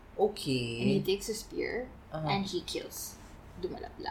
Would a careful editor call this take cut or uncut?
uncut